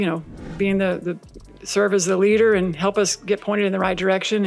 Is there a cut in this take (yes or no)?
no